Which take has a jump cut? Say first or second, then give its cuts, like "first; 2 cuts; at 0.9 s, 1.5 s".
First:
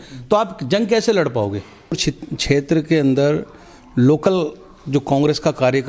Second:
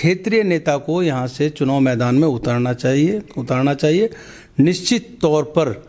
first; 1 cut; at 2.0 s